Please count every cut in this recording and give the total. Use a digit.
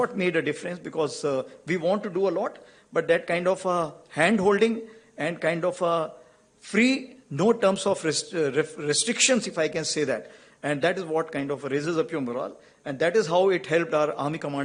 0